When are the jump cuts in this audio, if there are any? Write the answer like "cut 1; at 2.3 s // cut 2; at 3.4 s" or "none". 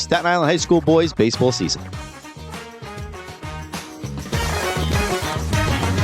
cut 1; at 1.7 s

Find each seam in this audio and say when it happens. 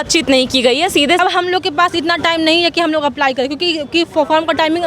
cut 1; at 1.2 s

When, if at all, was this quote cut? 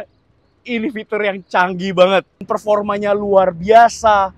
cut 1; at 2.5 s

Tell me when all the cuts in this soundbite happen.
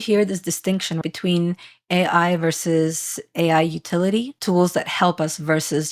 cut 1; at 1.0 s // cut 2; at 4.3 s

